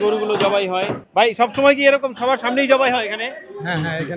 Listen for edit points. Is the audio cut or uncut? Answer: cut